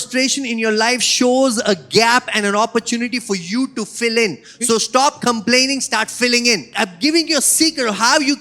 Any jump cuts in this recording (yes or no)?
yes